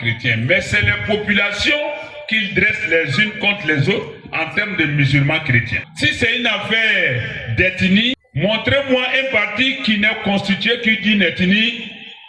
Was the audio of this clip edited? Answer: yes; 2 cuts; at 5.8 s, 8.2 s

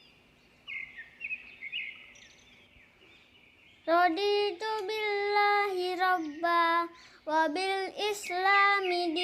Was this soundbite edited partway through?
yes; 1 cut; at 0.9 s

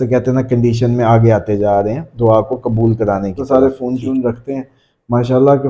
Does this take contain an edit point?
yes; 1 cut; at 3.4 s

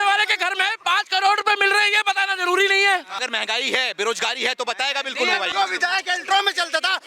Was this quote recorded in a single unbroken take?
no; 2 cuts; at 3.2 s, 5.5 s

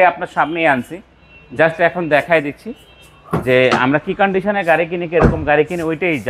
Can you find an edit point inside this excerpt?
no; 0 cuts

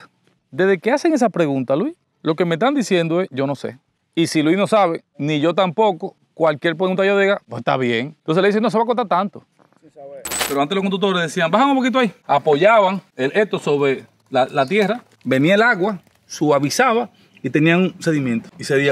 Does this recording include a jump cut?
yes; 3 cuts; at 5.1 s, 8.1 s, 10.4 s

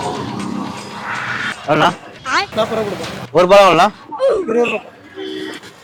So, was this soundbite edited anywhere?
no; 0 cuts

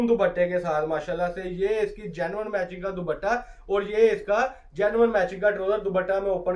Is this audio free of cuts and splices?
yes; 0 cuts

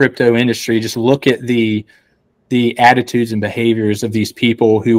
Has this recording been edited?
no; 0 cuts

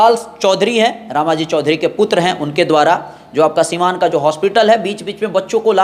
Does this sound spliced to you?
no; 0 cuts

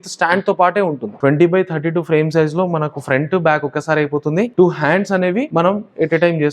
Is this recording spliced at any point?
yes; 3 cuts; at 1.1 s, 4.5 s, 5.5 s

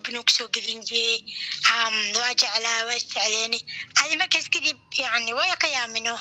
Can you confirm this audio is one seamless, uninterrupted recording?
yes; 0 cuts

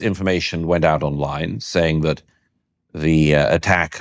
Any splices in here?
no; 0 cuts

